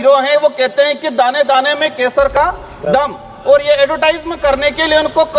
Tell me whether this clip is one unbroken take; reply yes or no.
yes